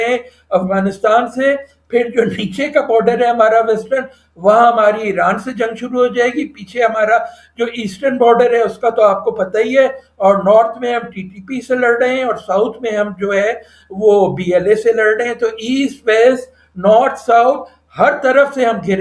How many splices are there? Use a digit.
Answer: 0